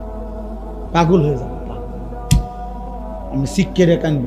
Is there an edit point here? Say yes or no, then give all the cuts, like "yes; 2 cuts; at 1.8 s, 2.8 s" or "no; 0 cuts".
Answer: yes; 1 cut; at 0.9 s